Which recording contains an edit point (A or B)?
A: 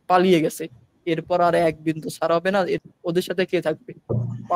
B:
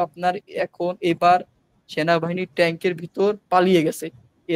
A